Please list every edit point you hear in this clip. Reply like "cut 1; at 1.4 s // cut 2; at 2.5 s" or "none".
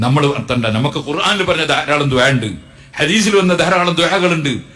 cut 1; at 2.3 s